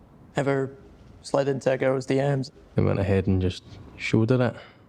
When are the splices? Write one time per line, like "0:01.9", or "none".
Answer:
0:02.5